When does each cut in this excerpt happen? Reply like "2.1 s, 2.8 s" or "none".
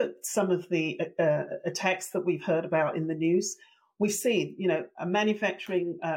none